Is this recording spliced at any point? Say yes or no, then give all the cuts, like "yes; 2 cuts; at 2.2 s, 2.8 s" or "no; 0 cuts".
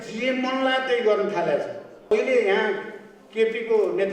yes; 1 cut; at 2.1 s